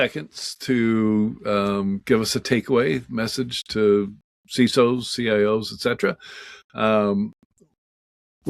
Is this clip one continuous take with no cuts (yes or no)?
yes